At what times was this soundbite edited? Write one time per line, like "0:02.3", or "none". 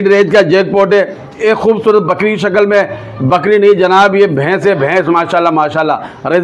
none